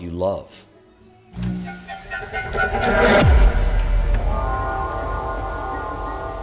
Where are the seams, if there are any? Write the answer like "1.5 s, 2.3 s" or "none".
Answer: 1.5 s